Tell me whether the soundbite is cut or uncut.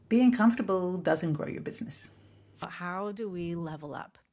cut